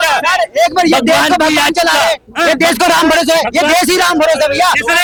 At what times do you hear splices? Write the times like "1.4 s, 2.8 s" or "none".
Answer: none